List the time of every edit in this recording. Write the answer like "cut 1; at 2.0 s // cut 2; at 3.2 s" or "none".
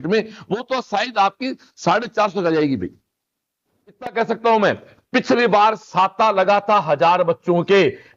cut 1; at 4.1 s